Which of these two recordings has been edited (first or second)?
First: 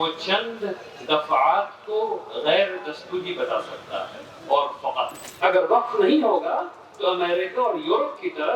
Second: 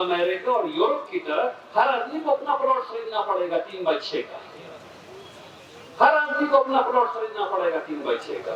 first